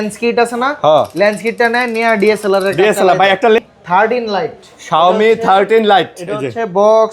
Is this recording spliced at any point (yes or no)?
yes